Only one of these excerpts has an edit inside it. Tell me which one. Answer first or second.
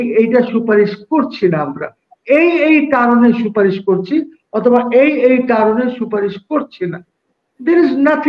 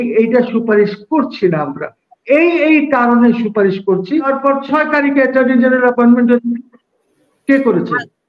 second